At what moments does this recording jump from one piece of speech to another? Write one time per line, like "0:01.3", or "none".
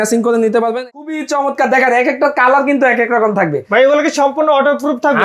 0:00.9